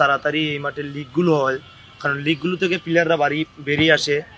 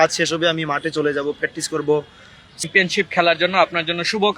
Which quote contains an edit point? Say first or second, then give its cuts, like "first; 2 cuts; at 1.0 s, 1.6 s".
second; 1 cut; at 2.6 s